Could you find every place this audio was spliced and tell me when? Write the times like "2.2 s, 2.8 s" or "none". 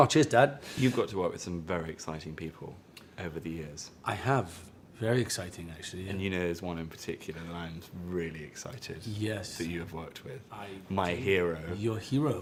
none